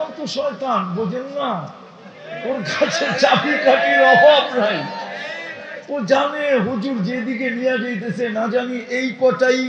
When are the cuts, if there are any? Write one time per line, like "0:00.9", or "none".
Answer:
none

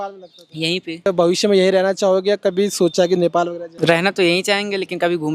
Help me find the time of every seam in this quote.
0:01.1
0:03.6

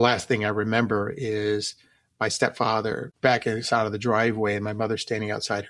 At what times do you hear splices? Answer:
0:03.1

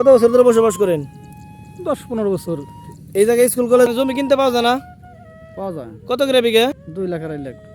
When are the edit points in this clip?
0:03.9
0:06.8

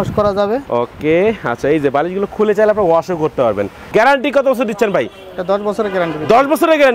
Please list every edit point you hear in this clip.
0:03.8

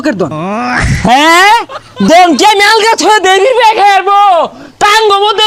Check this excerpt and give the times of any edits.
none

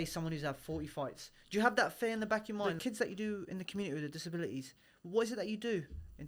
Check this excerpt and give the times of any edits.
0:02.7

